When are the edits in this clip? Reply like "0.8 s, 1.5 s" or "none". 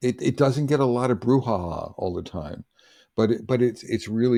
none